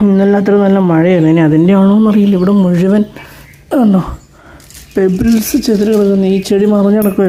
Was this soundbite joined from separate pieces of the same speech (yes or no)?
no